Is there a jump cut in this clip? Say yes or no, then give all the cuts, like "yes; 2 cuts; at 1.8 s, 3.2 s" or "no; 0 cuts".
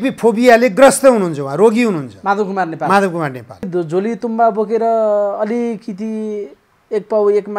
yes; 1 cut; at 3.7 s